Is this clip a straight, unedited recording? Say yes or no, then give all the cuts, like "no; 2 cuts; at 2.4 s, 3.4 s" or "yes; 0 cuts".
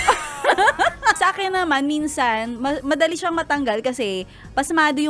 no; 1 cut; at 1.2 s